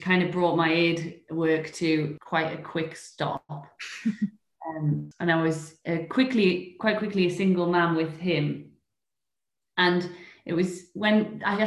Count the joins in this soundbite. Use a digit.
2